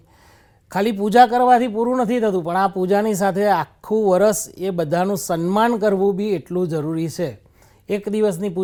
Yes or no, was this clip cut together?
no